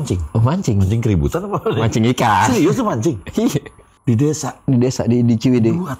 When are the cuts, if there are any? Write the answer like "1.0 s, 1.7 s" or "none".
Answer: 3.9 s